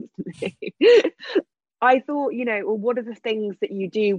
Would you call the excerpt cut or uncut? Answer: cut